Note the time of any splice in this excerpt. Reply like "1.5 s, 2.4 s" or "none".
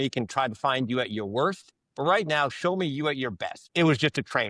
3.6 s